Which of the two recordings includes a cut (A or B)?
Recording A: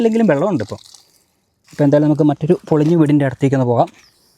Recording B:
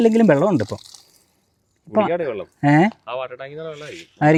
A